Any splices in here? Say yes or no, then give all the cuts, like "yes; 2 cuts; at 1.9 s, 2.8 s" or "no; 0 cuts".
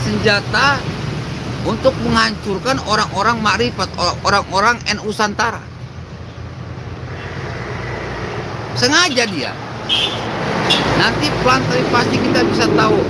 no; 0 cuts